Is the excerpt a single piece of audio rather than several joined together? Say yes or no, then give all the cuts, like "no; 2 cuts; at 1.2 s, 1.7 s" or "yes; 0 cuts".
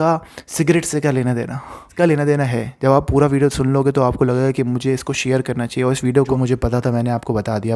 no; 2 cuts; at 1.9 s, 6.1 s